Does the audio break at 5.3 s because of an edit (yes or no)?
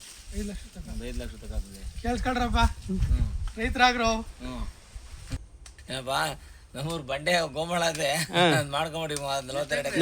yes